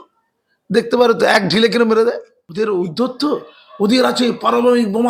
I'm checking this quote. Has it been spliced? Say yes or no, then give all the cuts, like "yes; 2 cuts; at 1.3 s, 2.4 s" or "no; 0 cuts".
yes; 1 cut; at 2.4 s